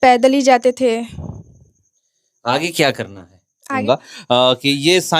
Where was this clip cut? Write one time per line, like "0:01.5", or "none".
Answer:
0:03.8

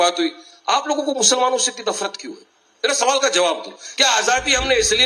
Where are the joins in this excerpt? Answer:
none

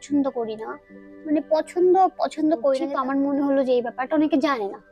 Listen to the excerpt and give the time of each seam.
0:02.9

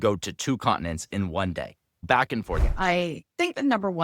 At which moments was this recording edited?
0:02.6

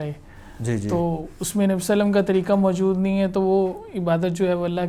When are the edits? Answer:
none

